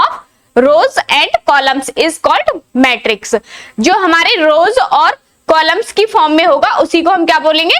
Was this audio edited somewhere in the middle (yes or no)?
no